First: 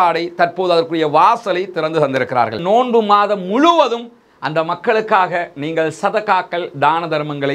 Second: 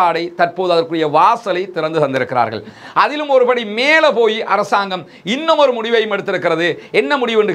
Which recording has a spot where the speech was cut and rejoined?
first; 1 cut; at 2.6 s

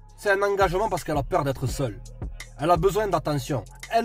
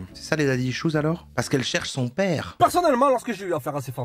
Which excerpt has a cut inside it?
second; 2 cuts; at 1.2 s, 2.5 s

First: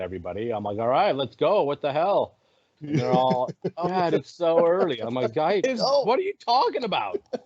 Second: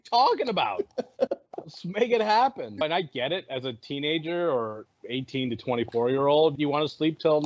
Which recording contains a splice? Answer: second; 2 cuts; at 4.9 s, 6.5 s

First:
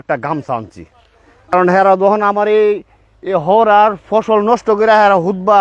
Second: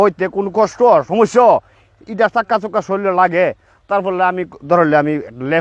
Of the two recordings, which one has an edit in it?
first; 1 cut; at 1.5 s

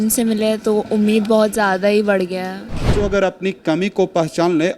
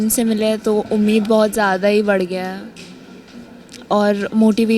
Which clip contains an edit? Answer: first; 1 cut; at 2.9 s

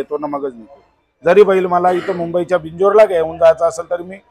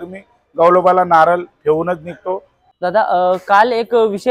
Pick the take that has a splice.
second; 1 cut; at 2.5 s

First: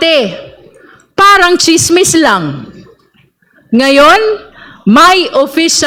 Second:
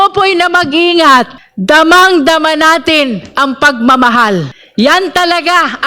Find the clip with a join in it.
second; 2 cuts; at 1.4 s, 4.6 s

